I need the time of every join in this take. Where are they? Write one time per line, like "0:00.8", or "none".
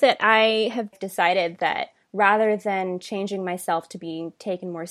0:00.9
0:02.0

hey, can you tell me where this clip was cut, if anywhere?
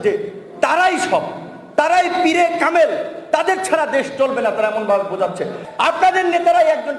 0:05.6

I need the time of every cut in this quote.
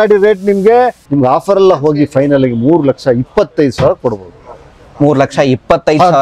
0:01.0

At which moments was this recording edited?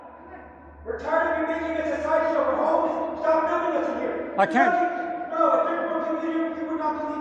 none

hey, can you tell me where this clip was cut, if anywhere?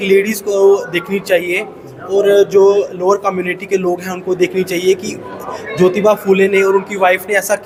none

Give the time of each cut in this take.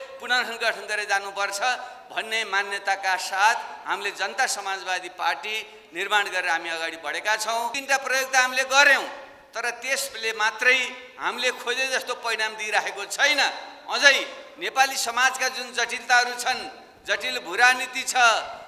0:07.8

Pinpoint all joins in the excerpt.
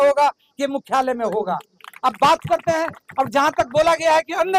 none

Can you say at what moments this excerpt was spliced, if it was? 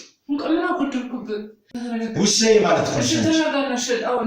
0:01.8

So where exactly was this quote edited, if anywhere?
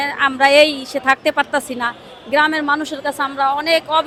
none

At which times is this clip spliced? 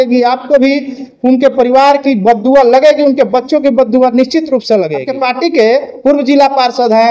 0:05.0

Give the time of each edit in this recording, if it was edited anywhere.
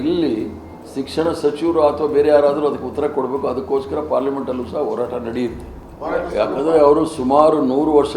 0:05.9

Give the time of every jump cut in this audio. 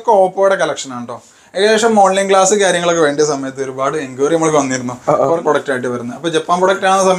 0:05.4

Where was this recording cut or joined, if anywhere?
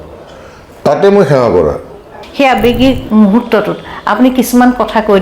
0:02.2

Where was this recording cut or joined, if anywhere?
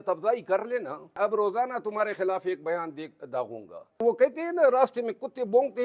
0:01.2
0:04.0

